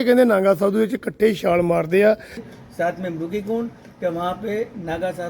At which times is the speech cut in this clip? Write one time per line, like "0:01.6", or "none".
0:02.5